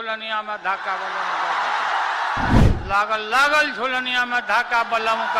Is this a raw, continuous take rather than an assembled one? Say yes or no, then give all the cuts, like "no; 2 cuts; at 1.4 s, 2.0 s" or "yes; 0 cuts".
no; 1 cut; at 2.6 s